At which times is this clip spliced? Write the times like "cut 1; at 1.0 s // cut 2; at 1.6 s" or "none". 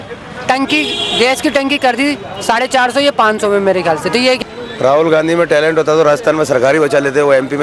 cut 1; at 4.4 s